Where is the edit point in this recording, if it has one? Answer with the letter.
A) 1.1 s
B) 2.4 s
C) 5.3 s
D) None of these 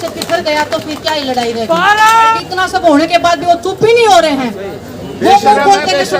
B